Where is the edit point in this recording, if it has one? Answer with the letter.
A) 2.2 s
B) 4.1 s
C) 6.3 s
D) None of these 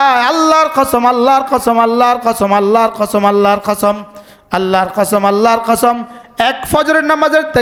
D